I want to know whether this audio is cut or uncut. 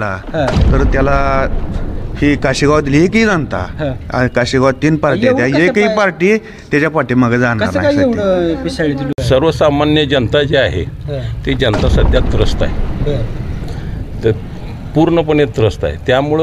cut